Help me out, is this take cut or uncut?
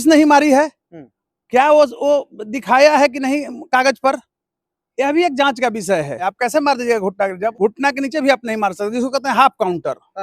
cut